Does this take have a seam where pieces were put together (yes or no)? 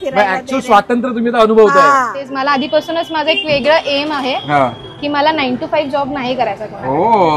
yes